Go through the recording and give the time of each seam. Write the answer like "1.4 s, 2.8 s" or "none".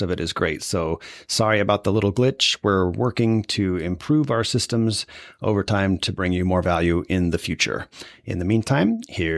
none